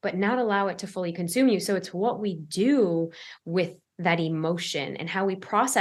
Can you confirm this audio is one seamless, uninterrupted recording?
yes; 0 cuts

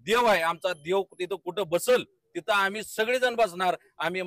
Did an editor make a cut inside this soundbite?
no; 0 cuts

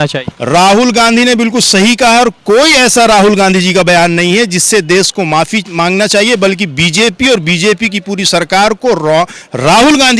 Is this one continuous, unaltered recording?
yes; 0 cuts

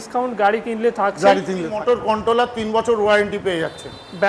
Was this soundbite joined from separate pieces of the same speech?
yes; 1 cut; at 1.7 s

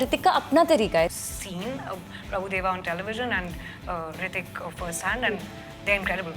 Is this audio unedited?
no; 1 cut; at 1.1 s

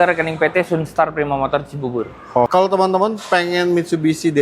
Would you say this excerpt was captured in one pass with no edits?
no; 1 cut; at 2.5 s

